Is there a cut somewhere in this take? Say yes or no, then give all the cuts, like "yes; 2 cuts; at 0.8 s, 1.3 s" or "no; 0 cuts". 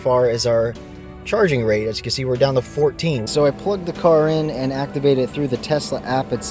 yes; 1 cut; at 3.3 s